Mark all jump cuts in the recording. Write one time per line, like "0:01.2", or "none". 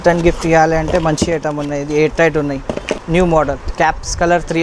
0:03.0
0:03.7